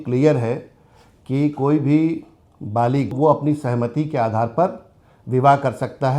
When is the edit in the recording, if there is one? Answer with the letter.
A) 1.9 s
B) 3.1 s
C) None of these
B